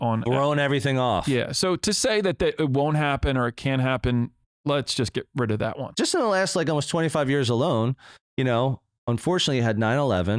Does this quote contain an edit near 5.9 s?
yes; 1 cut; at 5.9 s

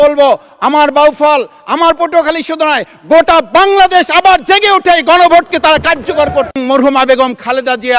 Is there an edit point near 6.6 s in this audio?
yes; 1 cut; at 6.6 s

